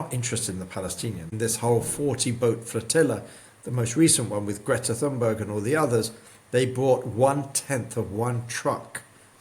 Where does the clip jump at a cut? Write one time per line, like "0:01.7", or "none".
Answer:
0:01.3